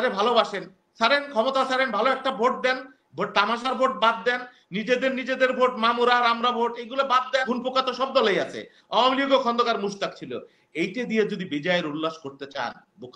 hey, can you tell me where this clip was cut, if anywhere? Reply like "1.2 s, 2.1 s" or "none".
7.5 s